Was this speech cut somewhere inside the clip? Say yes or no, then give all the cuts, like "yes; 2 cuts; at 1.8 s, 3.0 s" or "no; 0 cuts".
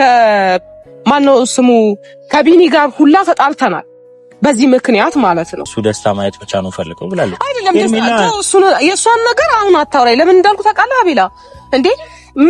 yes; 1 cut; at 5.6 s